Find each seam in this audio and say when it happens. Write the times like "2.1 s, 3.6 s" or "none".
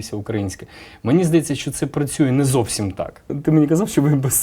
3.3 s